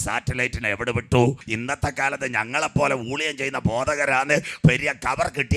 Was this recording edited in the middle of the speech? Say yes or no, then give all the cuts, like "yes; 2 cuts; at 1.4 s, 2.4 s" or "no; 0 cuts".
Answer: yes; 1 cut; at 1.5 s